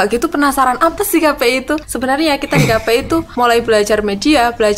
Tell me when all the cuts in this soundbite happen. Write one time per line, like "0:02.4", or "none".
0:01.9
0:03.3